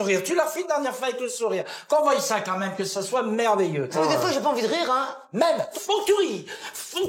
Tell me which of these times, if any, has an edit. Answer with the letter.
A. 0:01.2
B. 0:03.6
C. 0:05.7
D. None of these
C